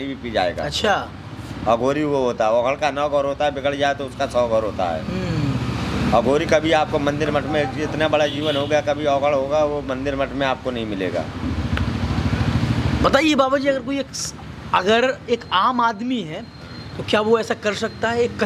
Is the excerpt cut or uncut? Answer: uncut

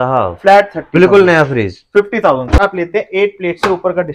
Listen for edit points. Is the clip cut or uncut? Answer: cut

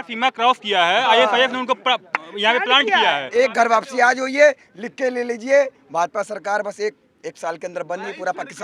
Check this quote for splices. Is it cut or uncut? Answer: cut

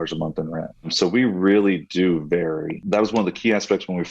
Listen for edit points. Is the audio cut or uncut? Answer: cut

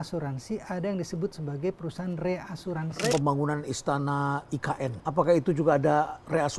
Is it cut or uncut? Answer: cut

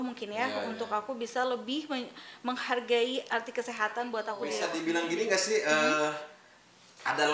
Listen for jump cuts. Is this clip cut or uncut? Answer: cut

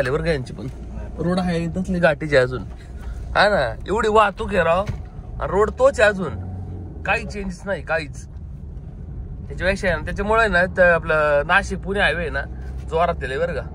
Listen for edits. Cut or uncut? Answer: uncut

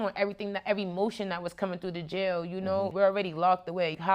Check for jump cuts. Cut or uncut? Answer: cut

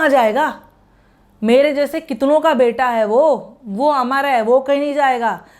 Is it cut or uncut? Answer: uncut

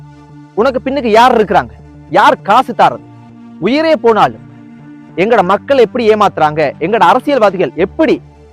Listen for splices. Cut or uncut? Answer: cut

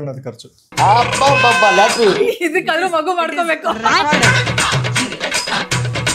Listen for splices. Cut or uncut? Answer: uncut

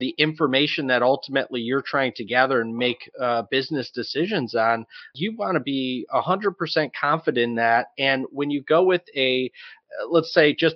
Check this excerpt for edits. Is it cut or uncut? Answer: uncut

